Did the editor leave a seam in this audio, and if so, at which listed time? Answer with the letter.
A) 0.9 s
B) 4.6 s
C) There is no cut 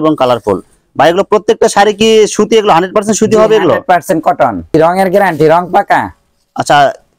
B